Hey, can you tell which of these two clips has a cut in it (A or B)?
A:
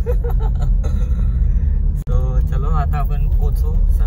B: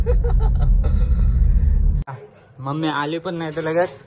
B